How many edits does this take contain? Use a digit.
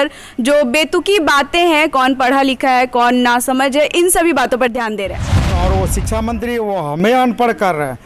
1